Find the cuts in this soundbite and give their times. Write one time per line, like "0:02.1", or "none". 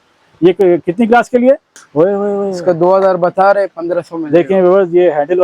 0:01.8